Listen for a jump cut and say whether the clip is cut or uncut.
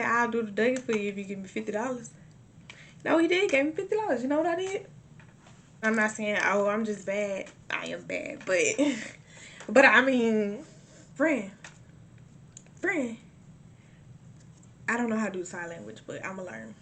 cut